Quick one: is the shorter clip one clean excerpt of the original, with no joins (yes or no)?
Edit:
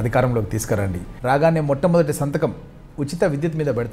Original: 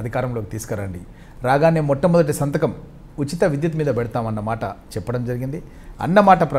no